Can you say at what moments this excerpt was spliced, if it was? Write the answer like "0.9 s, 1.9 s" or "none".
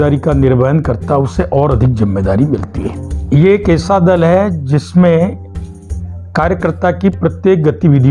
3.1 s